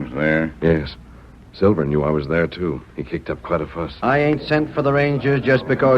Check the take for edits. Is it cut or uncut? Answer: cut